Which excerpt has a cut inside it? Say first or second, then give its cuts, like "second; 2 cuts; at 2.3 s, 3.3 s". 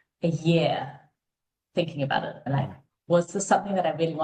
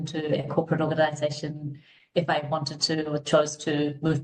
first; 1 cut; at 2.5 s